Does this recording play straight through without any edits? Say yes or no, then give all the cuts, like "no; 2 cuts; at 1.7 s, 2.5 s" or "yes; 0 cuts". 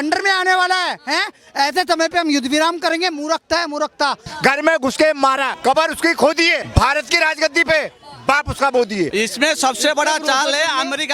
no; 4 cuts; at 4.3 s, 5.5 s, 6.6 s, 9.1 s